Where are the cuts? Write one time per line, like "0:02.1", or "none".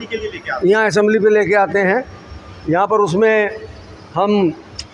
none